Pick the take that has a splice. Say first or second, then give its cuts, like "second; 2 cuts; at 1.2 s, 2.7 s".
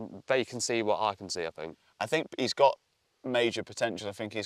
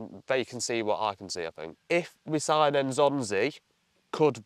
second; 1 cut; at 1.8 s